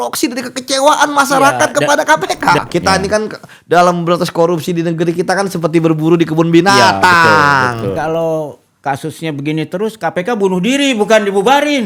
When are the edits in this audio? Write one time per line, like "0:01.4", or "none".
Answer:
0:02.6
0:07.9